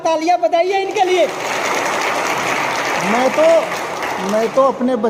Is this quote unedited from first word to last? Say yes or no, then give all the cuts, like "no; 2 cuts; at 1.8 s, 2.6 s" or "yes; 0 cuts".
yes; 0 cuts